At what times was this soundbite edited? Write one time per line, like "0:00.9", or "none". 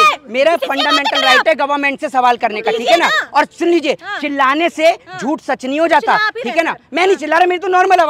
none